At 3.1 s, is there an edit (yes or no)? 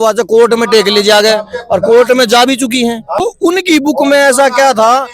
yes